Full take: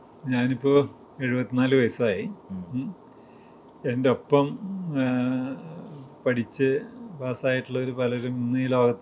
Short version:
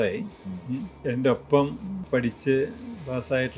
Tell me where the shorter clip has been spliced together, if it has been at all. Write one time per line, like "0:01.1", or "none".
0:00.9
0:01.9